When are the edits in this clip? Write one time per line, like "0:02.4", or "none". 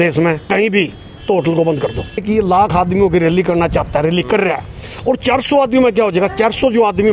0:02.2